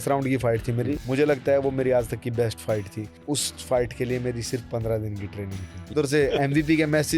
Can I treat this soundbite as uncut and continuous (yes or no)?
no